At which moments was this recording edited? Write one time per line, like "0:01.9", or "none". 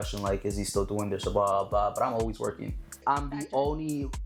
0:03.0